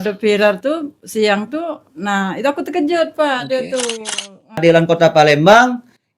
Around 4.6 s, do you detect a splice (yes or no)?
yes